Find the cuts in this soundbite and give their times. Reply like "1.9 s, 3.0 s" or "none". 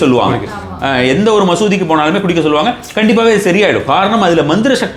none